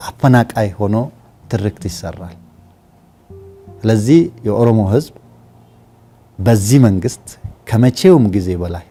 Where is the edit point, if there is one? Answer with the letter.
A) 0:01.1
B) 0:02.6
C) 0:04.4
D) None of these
D